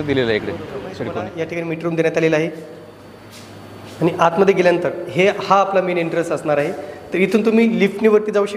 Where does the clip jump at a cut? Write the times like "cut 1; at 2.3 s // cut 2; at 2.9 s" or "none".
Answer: cut 1; at 1.2 s